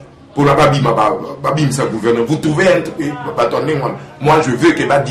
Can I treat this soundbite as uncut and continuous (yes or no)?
yes